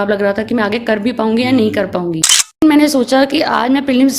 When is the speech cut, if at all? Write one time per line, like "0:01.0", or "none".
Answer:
0:02.6

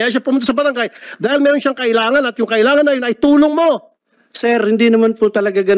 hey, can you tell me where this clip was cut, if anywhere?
none

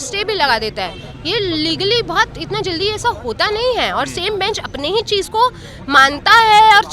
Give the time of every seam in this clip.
none

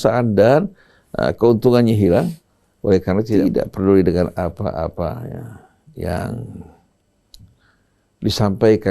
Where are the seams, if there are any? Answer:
0:03.4

